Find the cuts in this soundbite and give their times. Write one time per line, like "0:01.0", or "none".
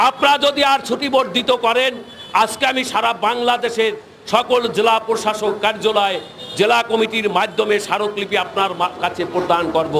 none